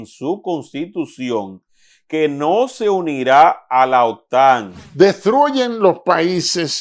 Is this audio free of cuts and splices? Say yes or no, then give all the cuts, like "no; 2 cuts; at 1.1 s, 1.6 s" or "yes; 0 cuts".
no; 1 cut; at 4.8 s